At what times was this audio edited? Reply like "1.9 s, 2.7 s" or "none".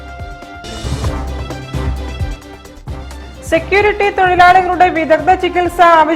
none